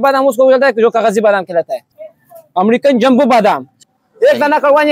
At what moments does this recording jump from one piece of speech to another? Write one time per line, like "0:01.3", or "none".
0:01.9
0:03.8